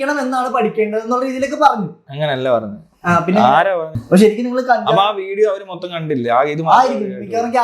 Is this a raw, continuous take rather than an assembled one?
no; 1 cut; at 4.0 s

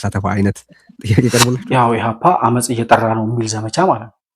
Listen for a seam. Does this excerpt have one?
yes; 1 cut; at 1.6 s

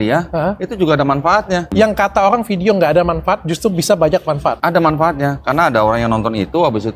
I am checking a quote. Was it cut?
yes; 2 cuts; at 1.7 s, 4.6 s

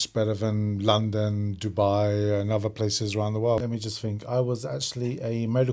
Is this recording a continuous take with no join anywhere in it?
no; 1 cut; at 3.6 s

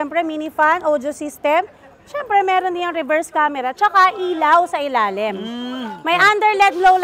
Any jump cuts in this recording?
no; 0 cuts

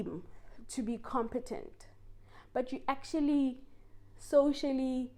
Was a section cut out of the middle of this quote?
no; 0 cuts

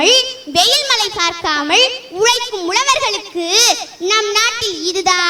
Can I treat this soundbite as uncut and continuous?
yes; 0 cuts

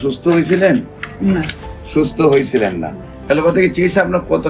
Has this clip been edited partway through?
yes; 1 cut; at 3.1 s

